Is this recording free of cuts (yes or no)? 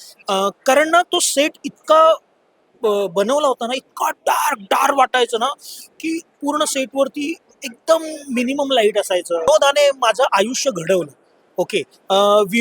no